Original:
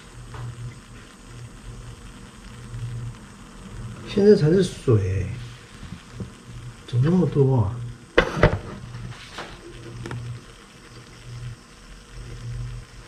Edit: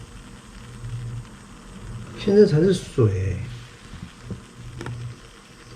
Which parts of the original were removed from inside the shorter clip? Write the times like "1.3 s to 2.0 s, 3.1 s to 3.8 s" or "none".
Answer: 6.6 s to 10.0 s